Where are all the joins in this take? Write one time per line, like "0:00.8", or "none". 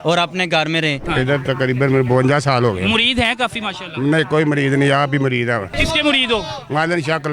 0:01.0
0:05.7